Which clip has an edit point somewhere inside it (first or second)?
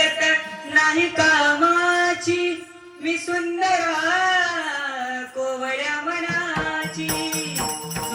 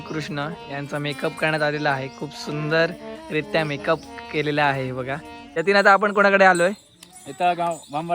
second